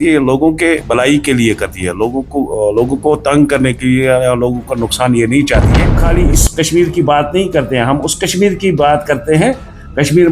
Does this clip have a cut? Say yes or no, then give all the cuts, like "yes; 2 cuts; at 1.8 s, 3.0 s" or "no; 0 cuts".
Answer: yes; 1 cut; at 6.0 s